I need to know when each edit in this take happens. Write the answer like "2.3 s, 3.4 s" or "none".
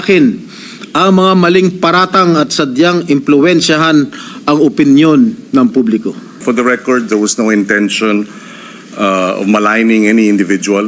6.4 s